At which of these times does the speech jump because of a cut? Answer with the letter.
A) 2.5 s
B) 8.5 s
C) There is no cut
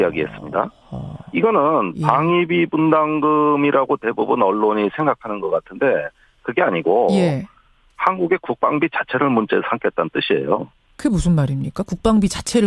C